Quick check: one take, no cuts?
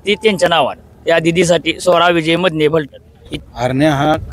no; 1 cut; at 3.2 s

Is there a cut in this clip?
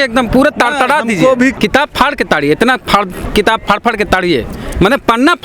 yes; 1 cut; at 1.6 s

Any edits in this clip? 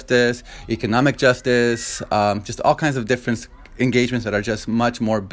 no; 0 cuts

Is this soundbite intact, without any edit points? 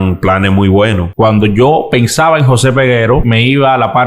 no; 2 cuts; at 1.1 s, 3.3 s

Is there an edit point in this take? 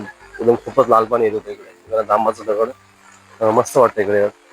no; 0 cuts

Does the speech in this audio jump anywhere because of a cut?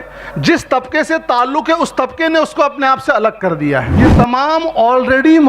yes; 1 cut; at 4.0 s

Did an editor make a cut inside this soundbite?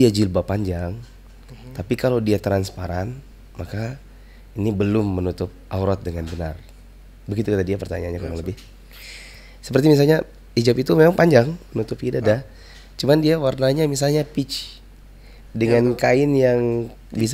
no; 0 cuts

